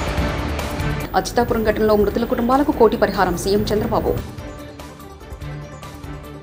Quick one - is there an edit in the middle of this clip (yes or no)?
no